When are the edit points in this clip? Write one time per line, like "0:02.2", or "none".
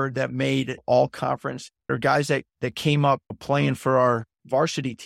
0:01.7